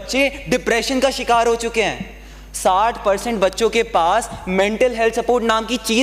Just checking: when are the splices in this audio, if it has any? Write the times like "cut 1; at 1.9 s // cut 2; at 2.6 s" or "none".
none